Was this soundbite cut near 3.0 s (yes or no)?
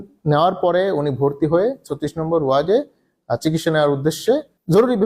no